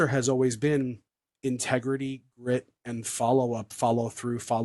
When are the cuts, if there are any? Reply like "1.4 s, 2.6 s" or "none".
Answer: none